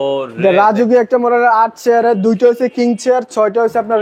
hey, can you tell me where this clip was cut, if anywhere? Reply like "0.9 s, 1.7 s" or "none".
none